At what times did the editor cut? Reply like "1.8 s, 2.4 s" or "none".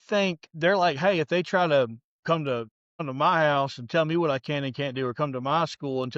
2.5 s